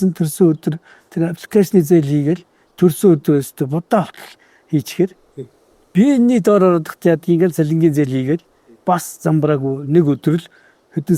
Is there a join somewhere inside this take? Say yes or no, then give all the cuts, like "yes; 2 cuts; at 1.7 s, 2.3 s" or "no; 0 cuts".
no; 0 cuts